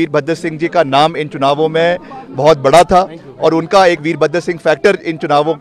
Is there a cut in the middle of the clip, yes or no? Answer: no